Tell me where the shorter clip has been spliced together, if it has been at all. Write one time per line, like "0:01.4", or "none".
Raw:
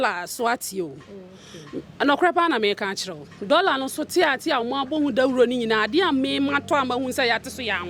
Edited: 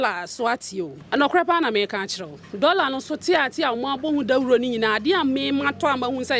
0:01.0